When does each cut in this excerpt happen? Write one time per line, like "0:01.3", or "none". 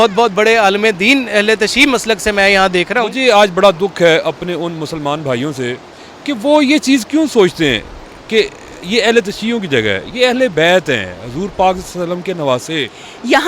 0:03.0
0:12.6